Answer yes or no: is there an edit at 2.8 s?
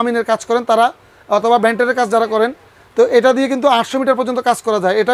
no